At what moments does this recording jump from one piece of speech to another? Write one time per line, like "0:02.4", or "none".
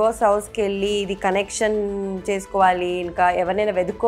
none